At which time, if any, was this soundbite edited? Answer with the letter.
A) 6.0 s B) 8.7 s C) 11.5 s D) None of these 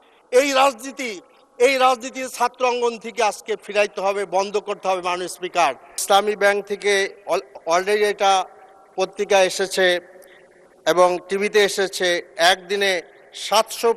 A